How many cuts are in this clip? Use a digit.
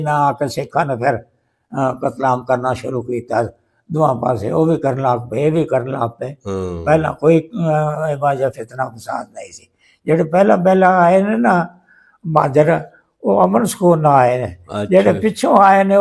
0